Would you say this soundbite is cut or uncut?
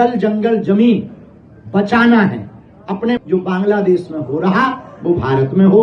cut